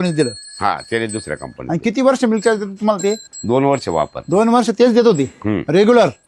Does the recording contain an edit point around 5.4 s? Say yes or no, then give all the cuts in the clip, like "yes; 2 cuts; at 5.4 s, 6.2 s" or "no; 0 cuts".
no; 1 cut; at 3.3 s